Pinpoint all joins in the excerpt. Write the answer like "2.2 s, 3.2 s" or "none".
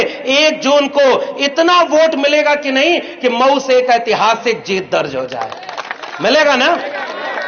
none